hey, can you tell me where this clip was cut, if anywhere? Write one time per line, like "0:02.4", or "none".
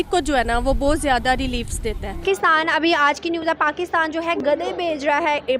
0:02.3